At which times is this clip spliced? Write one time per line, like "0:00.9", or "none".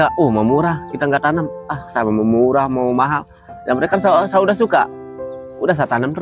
none